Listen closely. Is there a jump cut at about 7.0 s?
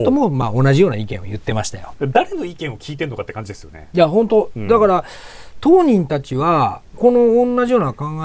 yes; 2 cuts; at 1.8 s, 7.0 s

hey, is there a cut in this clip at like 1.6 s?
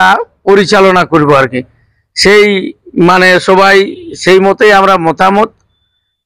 no; 0 cuts

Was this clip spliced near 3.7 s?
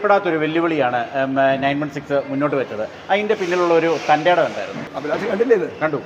no; 1 cut; at 4.9 s

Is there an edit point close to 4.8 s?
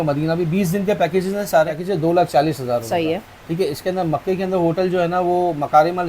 no; 1 cut; at 1.8 s

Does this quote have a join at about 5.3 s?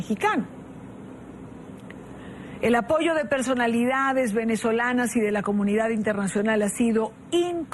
yes; 1 cut; at 5.3 s

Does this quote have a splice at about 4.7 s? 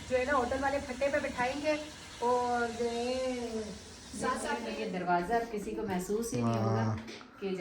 yes; 1 cut; at 4.7 s

